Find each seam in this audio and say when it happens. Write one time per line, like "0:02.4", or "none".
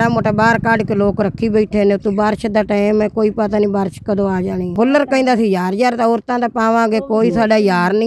0:04.7